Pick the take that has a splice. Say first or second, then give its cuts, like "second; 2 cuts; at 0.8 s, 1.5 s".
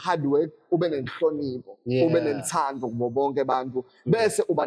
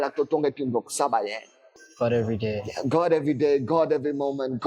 second; 1 cut; at 1.6 s